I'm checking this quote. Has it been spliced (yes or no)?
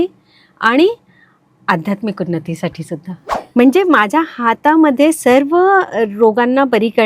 yes